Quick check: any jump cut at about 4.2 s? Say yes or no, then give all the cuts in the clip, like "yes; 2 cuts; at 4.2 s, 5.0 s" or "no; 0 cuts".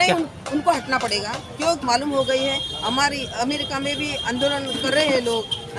no; 1 cut; at 1.8 s